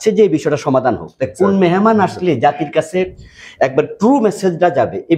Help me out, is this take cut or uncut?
uncut